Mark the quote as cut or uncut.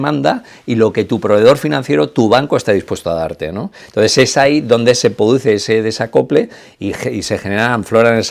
uncut